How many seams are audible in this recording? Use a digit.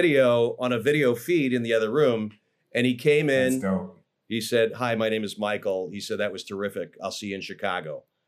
1